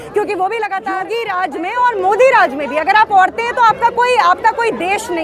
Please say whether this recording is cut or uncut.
cut